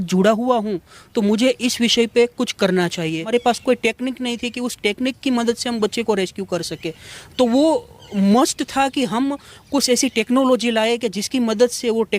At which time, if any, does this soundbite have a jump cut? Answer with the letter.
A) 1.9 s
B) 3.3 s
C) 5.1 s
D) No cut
B